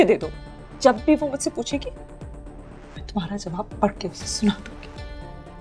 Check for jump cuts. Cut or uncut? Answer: uncut